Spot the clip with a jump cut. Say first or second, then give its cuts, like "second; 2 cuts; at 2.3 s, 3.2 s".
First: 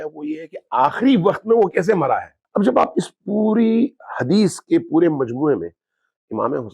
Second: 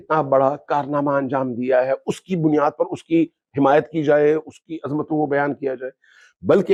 first; 1 cut; at 2.4 s